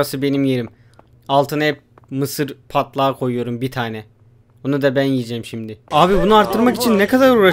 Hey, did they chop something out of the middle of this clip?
yes; 1 cut; at 5.8 s

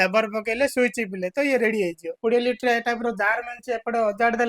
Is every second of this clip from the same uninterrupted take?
no; 1 cut; at 2.2 s

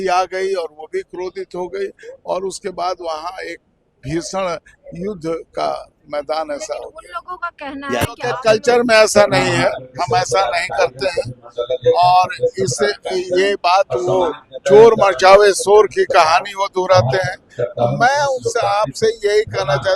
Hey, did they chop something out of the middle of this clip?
yes; 1 cut; at 8.3 s

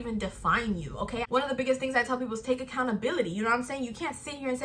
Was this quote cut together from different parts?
yes; 1 cut; at 1.2 s

